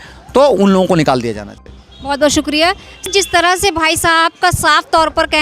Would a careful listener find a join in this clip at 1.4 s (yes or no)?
no